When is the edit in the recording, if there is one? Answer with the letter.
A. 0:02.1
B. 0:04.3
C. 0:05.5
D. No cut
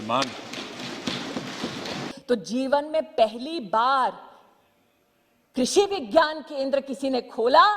A